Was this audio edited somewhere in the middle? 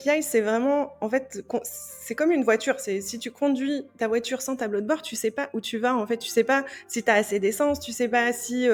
no; 0 cuts

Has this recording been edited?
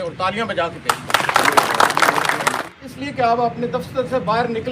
yes; 1 cut; at 2.7 s

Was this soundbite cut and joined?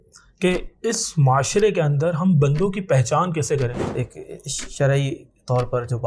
yes; 1 cut; at 3.9 s

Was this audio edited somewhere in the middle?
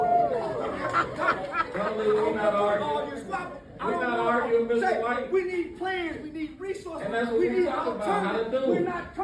no; 0 cuts

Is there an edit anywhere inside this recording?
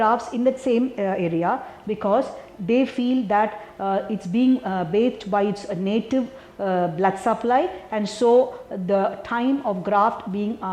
no; 0 cuts

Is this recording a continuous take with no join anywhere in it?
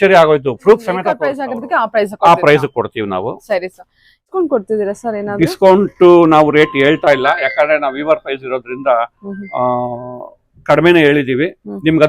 no; 2 cuts; at 1.4 s, 4.2 s

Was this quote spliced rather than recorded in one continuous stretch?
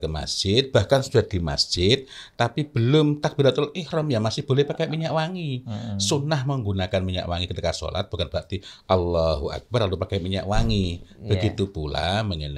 no; 0 cuts

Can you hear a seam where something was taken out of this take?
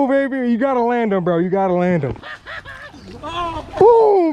yes; 1 cut; at 2.2 s

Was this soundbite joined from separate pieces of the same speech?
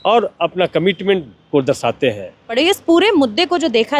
yes; 1 cut; at 2.5 s

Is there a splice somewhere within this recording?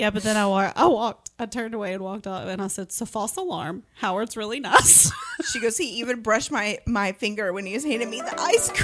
no; 0 cuts

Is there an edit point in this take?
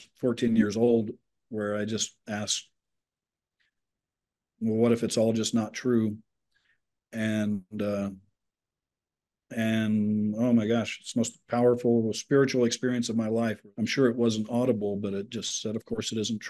yes; 1 cut; at 13.6 s

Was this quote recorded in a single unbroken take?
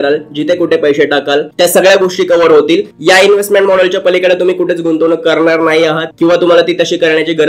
yes; 0 cuts

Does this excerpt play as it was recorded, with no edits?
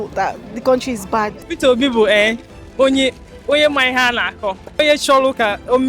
no; 2 cuts; at 1.4 s, 4.7 s

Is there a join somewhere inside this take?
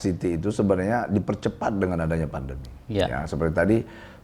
no; 0 cuts

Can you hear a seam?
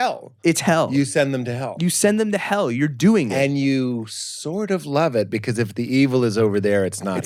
no; 0 cuts

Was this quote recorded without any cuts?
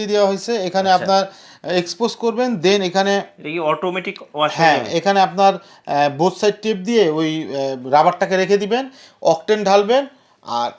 yes; 0 cuts

